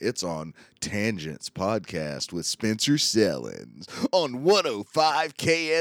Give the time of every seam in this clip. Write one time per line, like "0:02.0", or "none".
none